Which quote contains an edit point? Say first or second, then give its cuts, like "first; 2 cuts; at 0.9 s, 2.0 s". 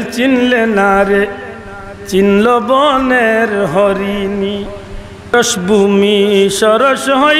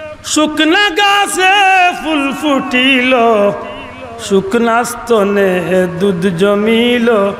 first; 1 cut; at 5.3 s